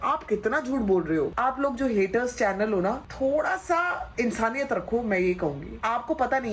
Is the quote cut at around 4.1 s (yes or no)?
no